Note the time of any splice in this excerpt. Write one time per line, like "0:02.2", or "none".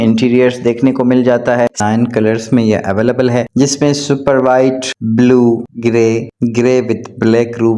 0:01.8